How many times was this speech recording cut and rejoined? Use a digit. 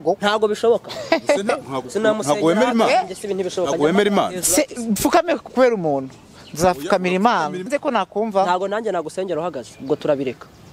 1